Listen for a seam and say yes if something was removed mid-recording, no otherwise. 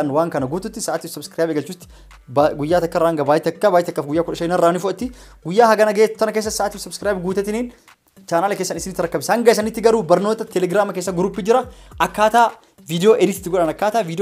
no